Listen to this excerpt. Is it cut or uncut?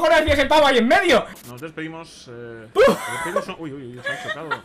uncut